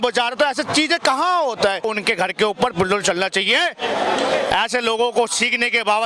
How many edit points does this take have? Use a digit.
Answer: 1